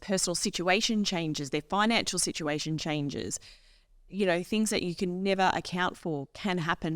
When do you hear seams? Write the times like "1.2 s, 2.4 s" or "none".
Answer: none